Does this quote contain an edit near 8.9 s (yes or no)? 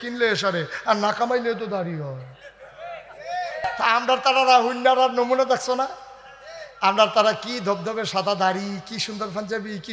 no